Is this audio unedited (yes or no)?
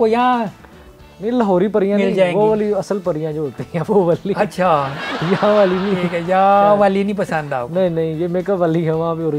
yes